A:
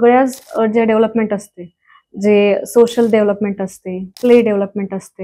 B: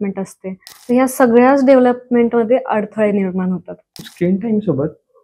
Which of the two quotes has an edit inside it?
B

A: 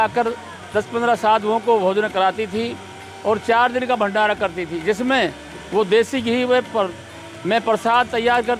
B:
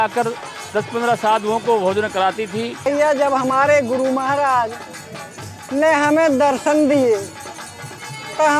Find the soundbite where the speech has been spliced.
B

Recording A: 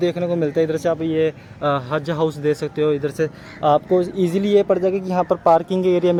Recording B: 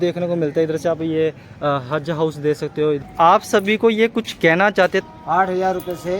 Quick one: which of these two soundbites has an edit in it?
B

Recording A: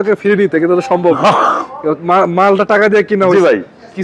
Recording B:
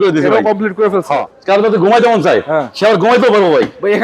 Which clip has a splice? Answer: B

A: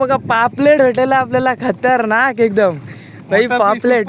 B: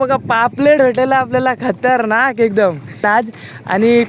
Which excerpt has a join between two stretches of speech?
B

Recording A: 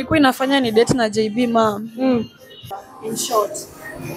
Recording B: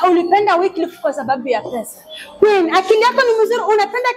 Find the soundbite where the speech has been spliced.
A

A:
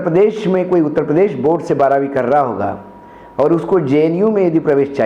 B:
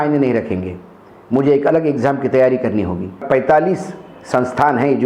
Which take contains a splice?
B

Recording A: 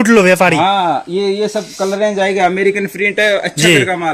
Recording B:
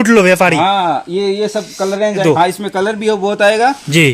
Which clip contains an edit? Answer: B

